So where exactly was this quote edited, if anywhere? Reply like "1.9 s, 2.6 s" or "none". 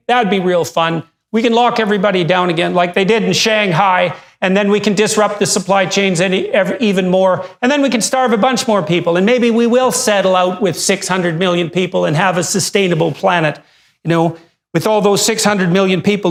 none